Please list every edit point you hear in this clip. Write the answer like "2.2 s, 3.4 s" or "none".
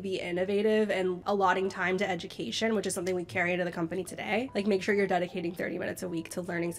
1.2 s, 4.5 s

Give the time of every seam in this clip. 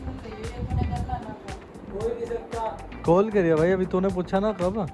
none

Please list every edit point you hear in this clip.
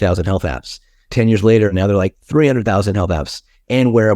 1.7 s

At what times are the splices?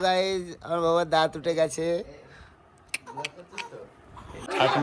none

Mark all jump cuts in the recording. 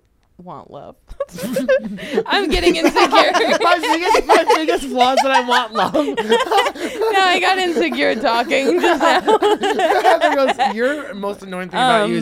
none

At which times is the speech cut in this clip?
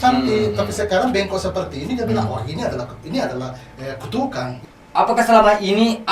4.6 s

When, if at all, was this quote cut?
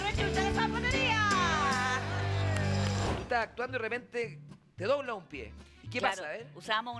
3.0 s

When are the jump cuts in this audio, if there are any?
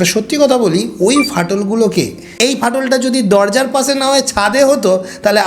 2.3 s

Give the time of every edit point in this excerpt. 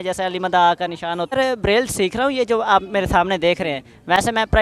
1.3 s

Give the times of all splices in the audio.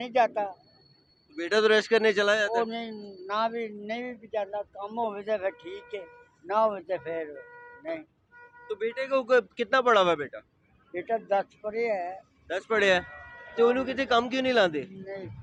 none

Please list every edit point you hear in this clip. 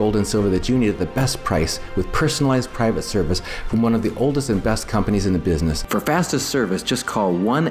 5.8 s

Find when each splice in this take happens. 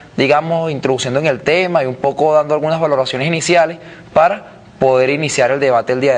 2.4 s

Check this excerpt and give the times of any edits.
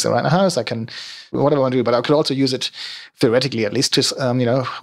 1.3 s

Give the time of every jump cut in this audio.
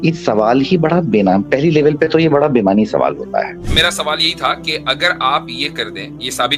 3.7 s

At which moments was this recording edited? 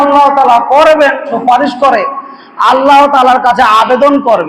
1.3 s

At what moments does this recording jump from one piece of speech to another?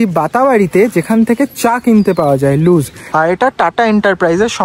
3.0 s

